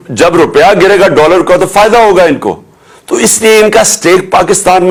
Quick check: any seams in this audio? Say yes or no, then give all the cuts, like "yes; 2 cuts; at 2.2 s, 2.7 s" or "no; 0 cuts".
no; 0 cuts